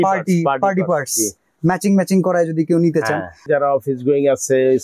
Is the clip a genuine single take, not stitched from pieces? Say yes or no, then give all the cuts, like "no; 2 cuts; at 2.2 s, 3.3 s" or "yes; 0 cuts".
no; 1 cut; at 3.5 s